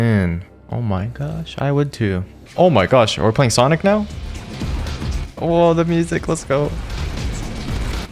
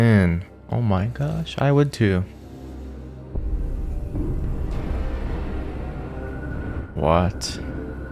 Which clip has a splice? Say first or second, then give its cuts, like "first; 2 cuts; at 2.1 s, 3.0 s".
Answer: first; 2 cuts; at 2.4 s, 7.0 s